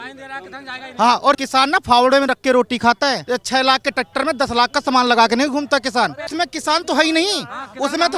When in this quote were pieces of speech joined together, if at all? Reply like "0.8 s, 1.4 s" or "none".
1.4 s, 3.2 s, 6.3 s